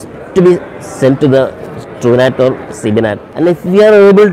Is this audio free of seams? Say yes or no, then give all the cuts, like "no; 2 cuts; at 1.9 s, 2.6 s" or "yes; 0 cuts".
no; 1 cut; at 3.2 s